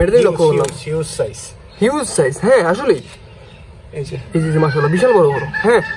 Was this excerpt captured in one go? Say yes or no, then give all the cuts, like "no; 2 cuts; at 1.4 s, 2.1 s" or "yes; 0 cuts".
yes; 0 cuts